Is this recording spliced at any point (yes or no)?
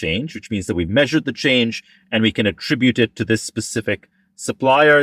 no